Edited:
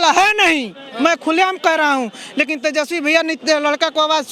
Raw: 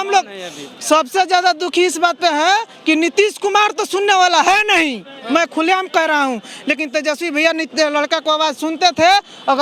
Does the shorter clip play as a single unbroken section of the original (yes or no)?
yes